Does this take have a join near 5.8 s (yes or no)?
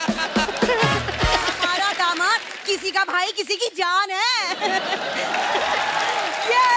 no